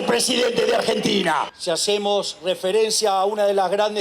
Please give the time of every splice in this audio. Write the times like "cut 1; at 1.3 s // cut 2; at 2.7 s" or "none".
cut 1; at 1.5 s